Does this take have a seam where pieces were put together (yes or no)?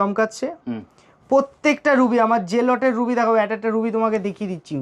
no